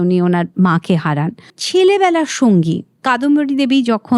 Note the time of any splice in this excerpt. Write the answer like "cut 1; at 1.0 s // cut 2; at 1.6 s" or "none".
cut 1; at 1.6 s // cut 2; at 2.9 s